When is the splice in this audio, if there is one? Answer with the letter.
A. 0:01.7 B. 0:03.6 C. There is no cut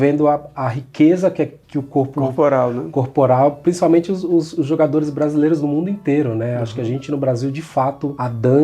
C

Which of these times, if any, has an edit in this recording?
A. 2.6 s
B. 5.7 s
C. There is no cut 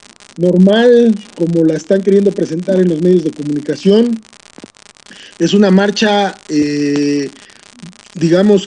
B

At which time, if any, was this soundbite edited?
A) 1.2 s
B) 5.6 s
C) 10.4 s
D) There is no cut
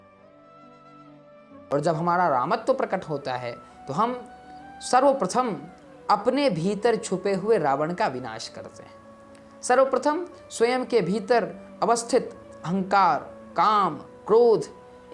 A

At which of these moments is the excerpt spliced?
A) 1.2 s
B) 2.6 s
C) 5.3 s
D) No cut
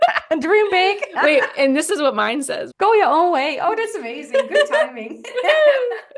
B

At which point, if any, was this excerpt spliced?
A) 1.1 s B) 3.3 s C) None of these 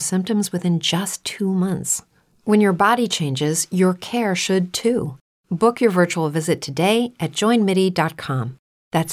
A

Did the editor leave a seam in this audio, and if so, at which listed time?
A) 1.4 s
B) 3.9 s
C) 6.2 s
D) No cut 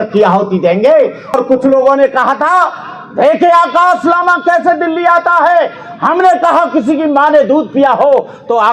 A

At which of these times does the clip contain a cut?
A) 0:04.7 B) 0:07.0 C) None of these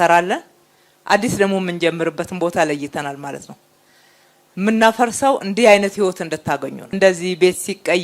B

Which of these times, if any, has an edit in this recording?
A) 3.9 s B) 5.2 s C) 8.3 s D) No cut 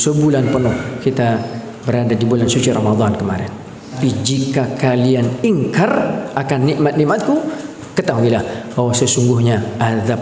A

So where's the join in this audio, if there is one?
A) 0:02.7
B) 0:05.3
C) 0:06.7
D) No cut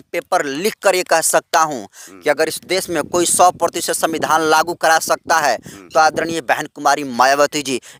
D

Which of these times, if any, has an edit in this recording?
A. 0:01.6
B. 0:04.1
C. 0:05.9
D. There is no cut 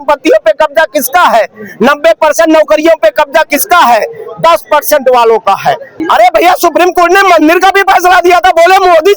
C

